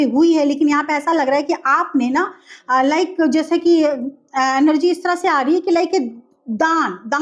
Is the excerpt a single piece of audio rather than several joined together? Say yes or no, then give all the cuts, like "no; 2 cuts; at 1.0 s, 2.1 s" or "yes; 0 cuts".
yes; 0 cuts